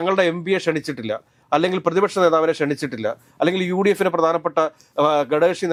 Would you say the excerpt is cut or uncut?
uncut